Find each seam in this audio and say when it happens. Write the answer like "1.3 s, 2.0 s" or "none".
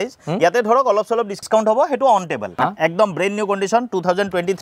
1.3 s, 2.4 s